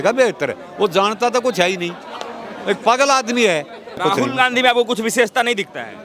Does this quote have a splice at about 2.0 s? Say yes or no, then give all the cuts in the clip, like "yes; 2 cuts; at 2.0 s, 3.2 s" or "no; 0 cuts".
no; 1 cut; at 4.0 s